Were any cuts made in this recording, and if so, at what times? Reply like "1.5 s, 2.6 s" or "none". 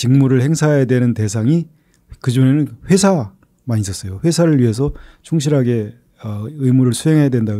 none